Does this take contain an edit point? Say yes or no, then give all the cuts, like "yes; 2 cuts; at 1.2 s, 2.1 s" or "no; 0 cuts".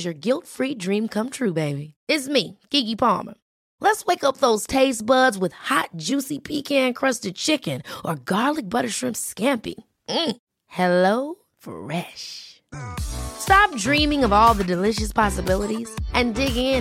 no; 0 cuts